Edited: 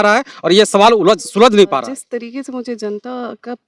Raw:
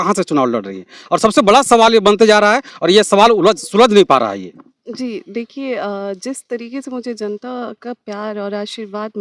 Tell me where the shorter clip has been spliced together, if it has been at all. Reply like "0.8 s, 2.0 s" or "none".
1.8 s